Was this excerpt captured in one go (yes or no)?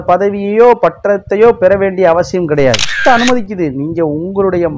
no